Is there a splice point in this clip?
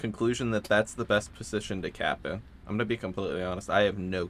no; 0 cuts

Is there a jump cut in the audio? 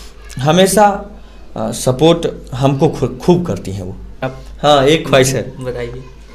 yes; 1 cut; at 4.4 s

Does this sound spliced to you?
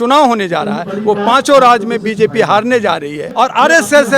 yes; 1 cut; at 3.3 s

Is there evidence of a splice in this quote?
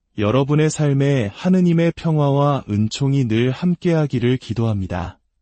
yes; 1 cut; at 0.9 s

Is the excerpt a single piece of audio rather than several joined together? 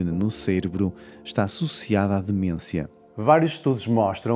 no; 1 cut; at 3.0 s

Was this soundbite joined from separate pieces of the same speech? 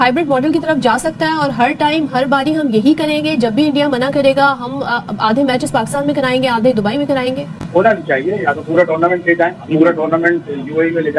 no; 0 cuts

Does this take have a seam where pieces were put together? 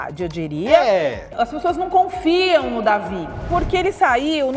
yes; 2 cuts; at 1.3 s, 3.5 s

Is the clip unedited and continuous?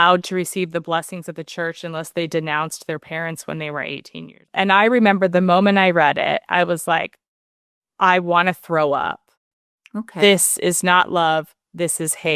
no; 1 cut; at 4.4 s

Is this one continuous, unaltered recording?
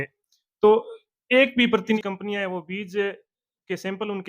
no; 1 cut; at 2.0 s

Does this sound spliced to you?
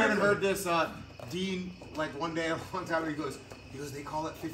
no; 0 cuts

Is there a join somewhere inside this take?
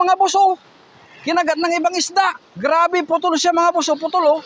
yes; 1 cut; at 2.5 s

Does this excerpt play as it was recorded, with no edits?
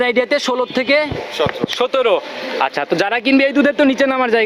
yes; 0 cuts

